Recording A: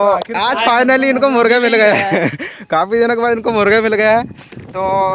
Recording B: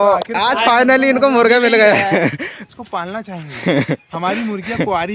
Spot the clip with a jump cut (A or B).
B